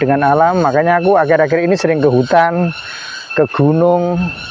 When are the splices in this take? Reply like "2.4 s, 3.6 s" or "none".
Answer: none